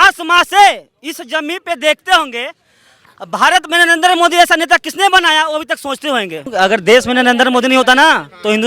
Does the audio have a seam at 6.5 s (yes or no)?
yes